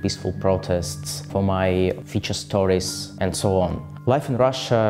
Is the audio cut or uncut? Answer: uncut